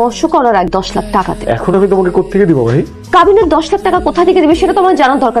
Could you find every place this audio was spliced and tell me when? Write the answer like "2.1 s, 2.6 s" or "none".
1.1 s